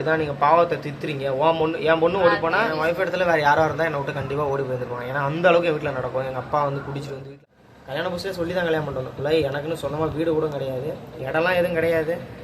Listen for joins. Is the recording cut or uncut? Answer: cut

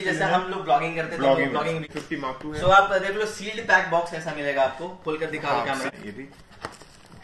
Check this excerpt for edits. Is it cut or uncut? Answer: cut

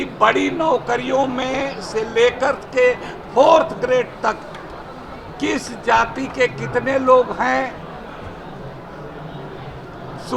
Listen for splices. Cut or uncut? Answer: uncut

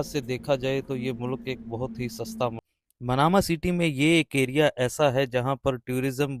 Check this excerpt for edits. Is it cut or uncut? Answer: cut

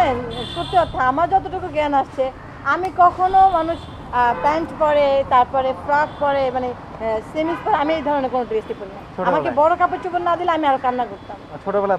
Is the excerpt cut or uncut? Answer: uncut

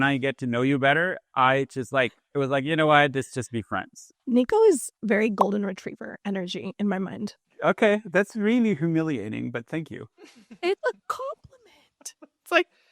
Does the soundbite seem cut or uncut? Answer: cut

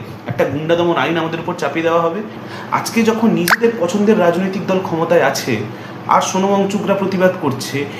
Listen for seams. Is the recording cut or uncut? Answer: cut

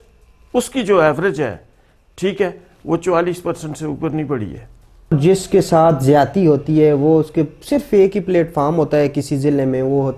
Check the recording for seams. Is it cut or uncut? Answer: cut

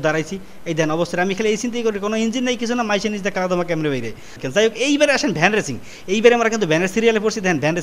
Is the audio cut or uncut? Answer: cut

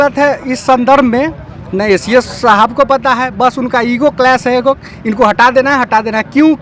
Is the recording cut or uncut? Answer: uncut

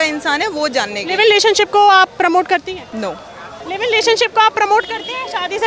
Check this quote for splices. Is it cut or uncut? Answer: uncut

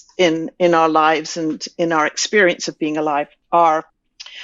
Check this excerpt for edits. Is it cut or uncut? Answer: cut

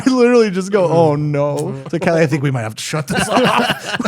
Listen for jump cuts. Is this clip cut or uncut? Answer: cut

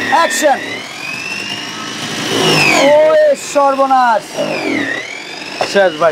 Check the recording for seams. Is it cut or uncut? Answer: uncut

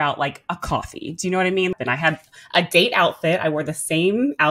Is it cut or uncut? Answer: cut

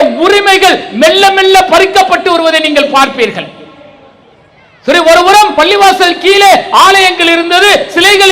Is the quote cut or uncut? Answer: uncut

